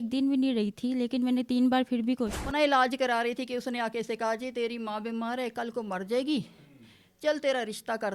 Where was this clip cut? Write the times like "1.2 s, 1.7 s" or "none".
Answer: 2.4 s